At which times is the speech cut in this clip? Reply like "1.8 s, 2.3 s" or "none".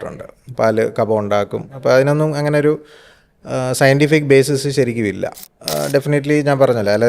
5.3 s